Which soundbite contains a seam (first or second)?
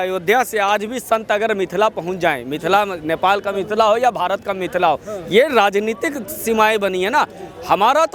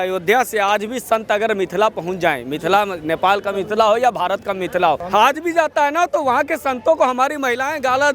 second